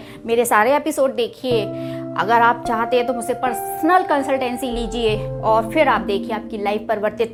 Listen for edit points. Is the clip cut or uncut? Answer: uncut